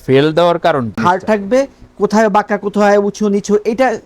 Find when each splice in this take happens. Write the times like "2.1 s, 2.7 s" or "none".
0.9 s